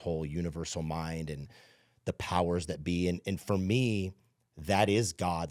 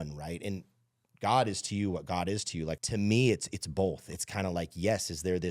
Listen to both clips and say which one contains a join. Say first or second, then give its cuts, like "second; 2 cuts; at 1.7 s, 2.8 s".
second; 1 cut; at 2.8 s